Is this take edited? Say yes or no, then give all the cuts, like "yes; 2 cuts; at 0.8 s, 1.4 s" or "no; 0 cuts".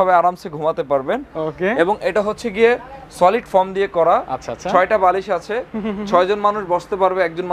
no; 0 cuts